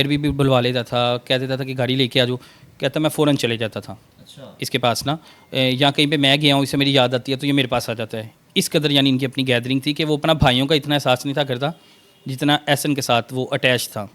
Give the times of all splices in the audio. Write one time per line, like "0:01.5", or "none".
none